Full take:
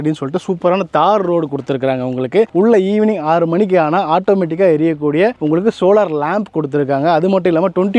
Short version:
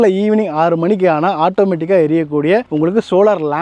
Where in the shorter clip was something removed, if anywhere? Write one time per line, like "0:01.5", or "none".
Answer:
none